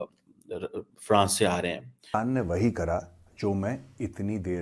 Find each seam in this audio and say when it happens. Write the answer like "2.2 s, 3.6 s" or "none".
2.0 s